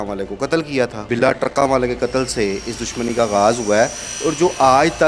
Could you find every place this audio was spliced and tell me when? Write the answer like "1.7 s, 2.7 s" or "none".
1.0 s